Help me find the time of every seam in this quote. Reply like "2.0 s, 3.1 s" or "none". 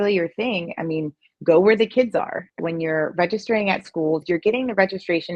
2.5 s, 4.2 s